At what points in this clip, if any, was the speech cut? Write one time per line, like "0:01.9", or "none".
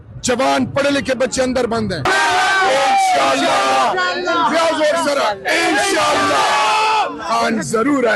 0:02.1